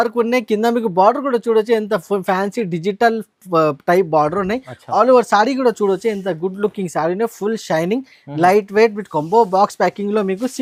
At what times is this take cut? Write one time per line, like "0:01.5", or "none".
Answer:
none